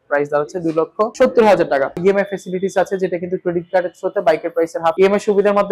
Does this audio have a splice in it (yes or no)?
yes